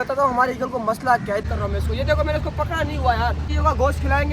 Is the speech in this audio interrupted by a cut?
yes; 2 cuts; at 1.4 s, 3.5 s

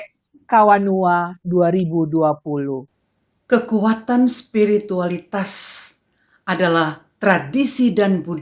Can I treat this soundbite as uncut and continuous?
no; 1 cut; at 2.9 s

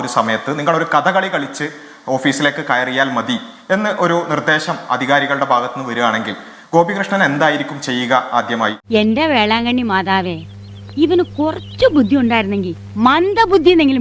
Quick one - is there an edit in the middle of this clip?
no; 0 cuts

